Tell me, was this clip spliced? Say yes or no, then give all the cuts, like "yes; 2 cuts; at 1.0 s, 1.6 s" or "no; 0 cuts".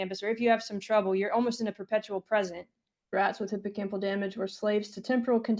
yes; 1 cut; at 3.1 s